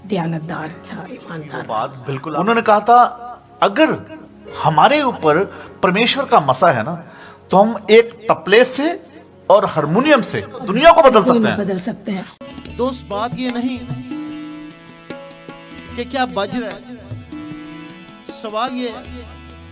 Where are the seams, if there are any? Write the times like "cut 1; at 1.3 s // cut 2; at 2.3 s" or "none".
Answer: cut 1; at 1.7 s // cut 2; at 10.7 s // cut 3; at 12.6 s